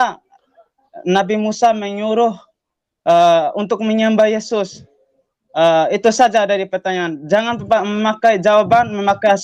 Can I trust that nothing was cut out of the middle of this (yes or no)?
yes